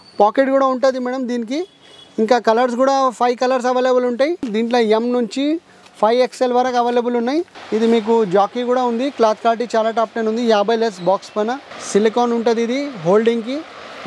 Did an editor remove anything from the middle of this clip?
yes; 3 cuts; at 4.5 s, 7.6 s, 11.8 s

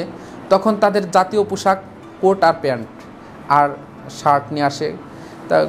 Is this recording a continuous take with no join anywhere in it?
yes; 0 cuts

